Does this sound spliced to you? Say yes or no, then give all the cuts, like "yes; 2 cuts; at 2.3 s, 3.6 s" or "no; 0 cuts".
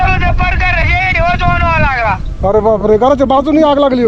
no; 0 cuts